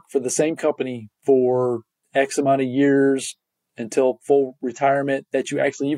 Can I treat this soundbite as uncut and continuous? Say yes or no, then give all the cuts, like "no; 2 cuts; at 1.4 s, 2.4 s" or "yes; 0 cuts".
no; 1 cut; at 4.6 s